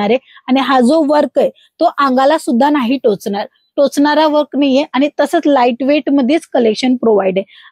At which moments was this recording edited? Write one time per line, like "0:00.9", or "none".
none